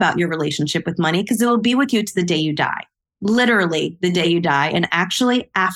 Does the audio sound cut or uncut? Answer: uncut